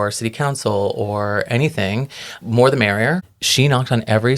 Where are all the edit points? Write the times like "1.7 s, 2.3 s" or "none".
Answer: 2.3 s, 3.2 s